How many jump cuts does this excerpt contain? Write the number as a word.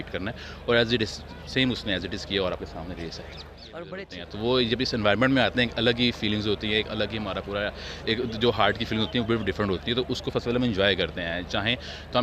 one